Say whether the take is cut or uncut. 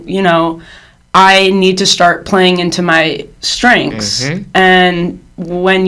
uncut